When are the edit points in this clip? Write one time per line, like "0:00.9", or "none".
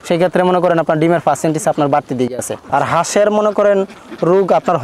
0:02.5

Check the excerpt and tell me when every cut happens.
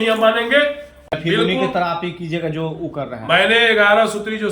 0:01.1

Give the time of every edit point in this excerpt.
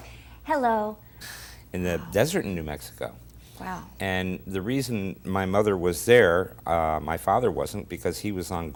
none

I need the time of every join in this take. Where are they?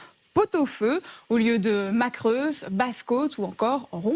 none

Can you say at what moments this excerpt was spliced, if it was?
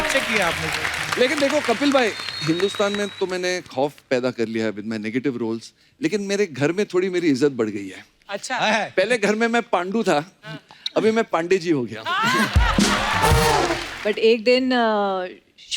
0:13.9

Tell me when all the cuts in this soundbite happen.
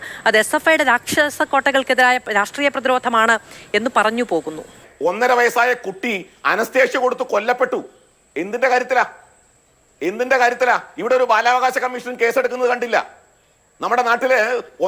0:04.9

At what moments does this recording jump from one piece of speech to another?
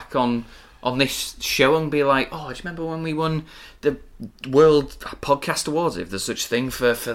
none

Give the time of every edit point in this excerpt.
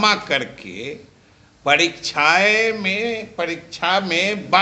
none

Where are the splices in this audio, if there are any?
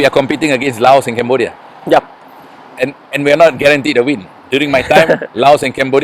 none

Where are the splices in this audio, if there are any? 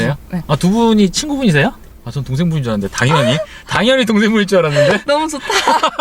0:01.9

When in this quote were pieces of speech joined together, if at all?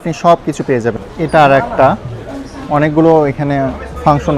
0:01.0

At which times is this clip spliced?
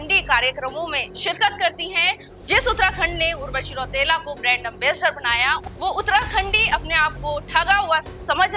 0:02.3
0:05.6

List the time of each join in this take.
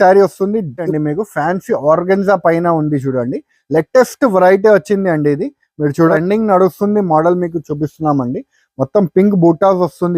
0:00.9
0:06.1

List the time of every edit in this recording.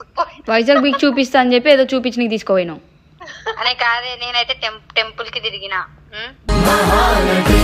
none

